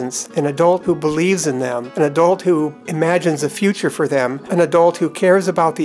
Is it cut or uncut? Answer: cut